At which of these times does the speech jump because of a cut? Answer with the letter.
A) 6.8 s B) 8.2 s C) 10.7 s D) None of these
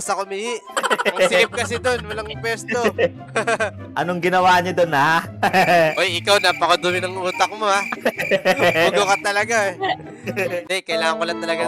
C